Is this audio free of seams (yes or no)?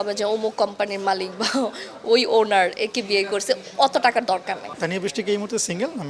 no